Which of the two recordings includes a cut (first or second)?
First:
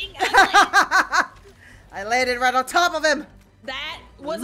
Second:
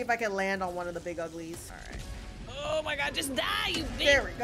second